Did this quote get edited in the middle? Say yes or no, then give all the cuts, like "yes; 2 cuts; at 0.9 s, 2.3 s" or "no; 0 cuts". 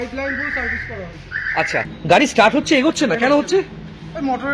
yes; 1 cut; at 1.9 s